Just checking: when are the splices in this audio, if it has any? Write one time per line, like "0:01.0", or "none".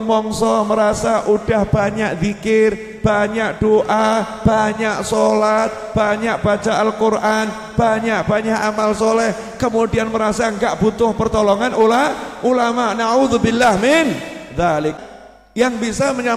0:15.0